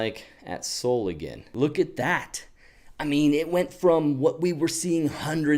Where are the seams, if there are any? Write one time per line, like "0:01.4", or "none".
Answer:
0:01.4